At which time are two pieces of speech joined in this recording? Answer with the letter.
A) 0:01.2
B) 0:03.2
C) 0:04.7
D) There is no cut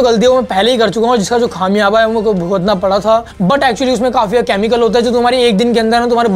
B